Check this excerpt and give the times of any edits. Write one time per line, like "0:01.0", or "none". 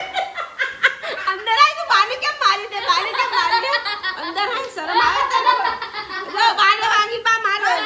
none